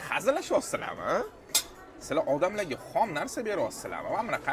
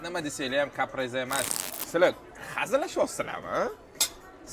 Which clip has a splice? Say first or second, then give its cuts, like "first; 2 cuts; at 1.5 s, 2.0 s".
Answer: second; 1 cut; at 1.5 s